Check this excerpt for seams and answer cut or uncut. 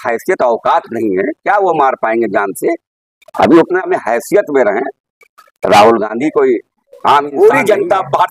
cut